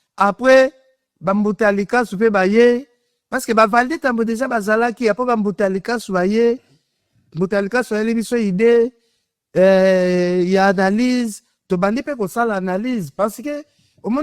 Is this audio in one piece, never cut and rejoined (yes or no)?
yes